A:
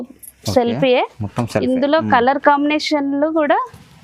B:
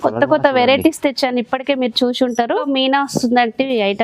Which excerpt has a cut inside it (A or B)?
B